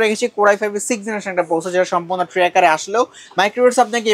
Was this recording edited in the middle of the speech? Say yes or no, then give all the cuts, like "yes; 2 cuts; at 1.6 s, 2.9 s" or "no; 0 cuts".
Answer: no; 0 cuts